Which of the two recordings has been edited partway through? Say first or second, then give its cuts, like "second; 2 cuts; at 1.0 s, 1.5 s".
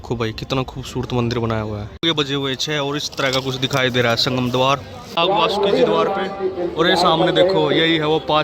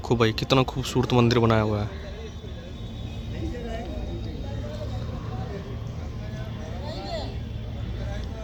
first; 2 cuts; at 1.9 s, 5.1 s